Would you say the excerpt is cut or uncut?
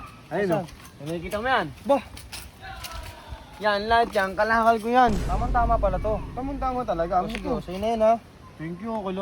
cut